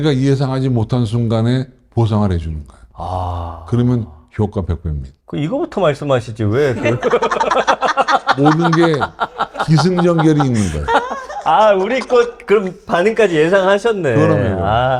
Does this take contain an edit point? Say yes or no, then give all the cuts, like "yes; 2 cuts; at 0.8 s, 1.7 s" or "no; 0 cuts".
no; 0 cuts